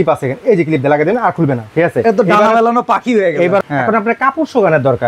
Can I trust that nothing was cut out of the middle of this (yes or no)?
no